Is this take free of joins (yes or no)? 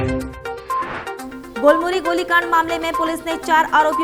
yes